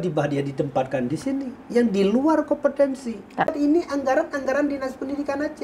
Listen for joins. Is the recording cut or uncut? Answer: cut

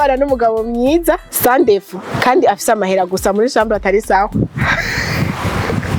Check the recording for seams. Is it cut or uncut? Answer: uncut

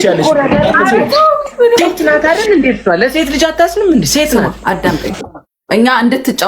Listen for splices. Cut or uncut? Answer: cut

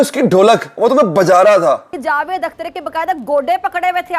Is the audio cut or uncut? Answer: cut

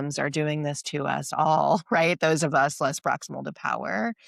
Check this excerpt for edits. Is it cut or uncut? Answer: uncut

